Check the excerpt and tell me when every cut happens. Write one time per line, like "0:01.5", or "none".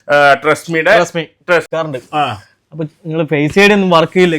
0:01.7